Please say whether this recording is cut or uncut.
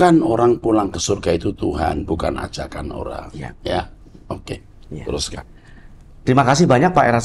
uncut